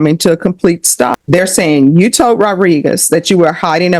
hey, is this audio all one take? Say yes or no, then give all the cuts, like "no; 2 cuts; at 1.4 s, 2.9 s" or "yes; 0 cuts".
no; 1 cut; at 1.2 s